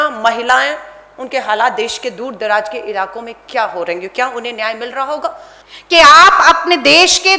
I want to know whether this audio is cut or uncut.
cut